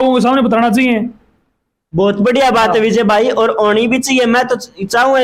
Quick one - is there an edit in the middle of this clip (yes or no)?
no